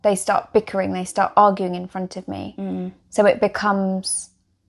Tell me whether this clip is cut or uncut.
uncut